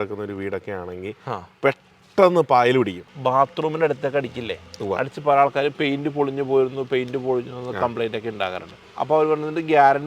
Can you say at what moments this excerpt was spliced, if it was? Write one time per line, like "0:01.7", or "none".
0:03.1
0:08.8